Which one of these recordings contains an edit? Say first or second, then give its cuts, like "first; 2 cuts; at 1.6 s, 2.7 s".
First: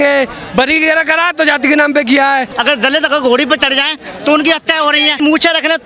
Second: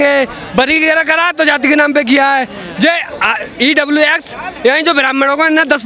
first; 1 cut; at 2.5 s